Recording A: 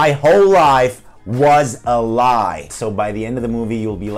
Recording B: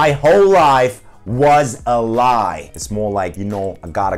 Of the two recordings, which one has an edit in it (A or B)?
B